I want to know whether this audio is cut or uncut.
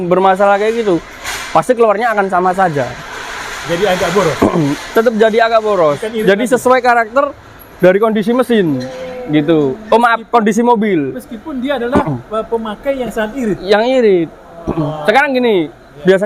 uncut